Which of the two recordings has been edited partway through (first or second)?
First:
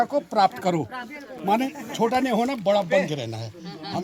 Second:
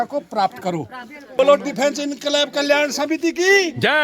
second